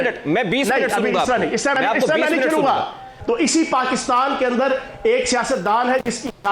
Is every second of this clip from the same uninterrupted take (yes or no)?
no